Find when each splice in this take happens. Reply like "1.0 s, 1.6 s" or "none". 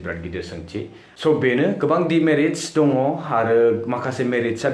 1.0 s